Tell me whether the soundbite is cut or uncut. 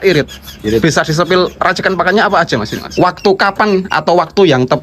cut